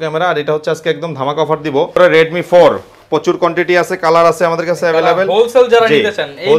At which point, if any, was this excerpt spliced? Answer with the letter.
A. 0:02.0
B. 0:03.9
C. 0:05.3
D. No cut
A